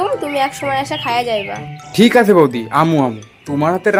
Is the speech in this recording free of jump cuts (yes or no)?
yes